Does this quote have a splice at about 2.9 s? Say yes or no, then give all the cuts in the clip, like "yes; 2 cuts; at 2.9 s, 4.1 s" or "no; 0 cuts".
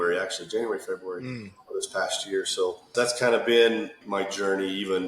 yes; 2 cuts; at 2.9 s, 4.0 s